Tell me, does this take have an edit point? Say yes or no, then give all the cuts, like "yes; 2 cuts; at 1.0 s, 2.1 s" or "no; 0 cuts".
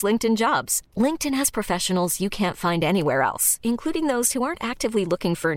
no; 0 cuts